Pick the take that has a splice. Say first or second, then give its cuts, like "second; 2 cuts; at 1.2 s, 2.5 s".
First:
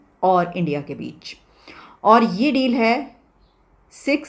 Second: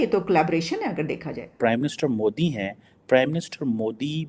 second; 1 cut; at 1.6 s